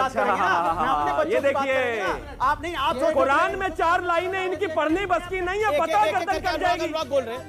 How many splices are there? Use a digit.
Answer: 0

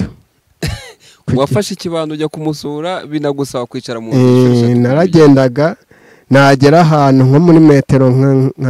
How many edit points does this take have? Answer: 0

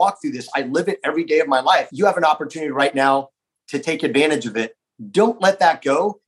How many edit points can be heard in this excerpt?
1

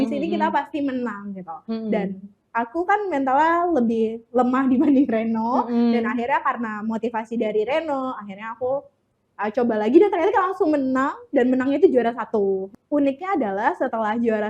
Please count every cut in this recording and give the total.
1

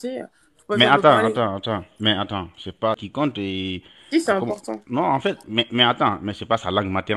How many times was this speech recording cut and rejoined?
1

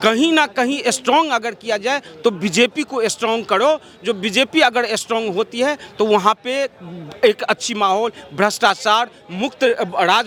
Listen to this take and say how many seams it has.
0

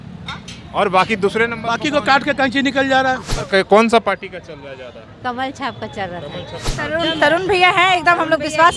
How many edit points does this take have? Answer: 2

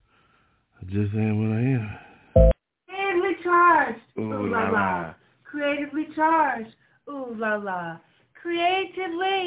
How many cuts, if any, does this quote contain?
1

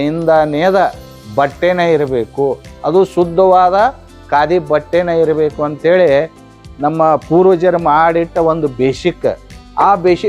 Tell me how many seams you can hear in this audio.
0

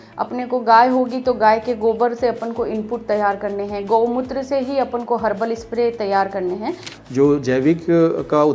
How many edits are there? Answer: 1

